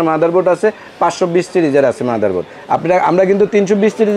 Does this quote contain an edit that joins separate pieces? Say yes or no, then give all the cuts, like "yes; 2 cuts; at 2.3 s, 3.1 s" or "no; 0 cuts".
no; 0 cuts